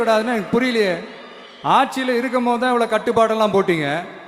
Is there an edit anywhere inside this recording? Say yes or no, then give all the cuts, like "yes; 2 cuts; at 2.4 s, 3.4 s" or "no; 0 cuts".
no; 0 cuts